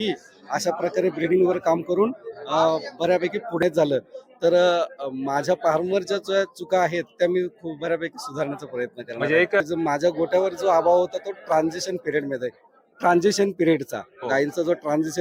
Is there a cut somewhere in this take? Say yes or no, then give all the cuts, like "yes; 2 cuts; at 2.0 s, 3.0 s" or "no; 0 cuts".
yes; 2 cuts; at 3.6 s, 9.6 s